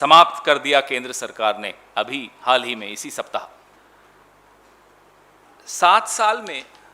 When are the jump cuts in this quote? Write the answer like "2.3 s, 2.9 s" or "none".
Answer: 3.8 s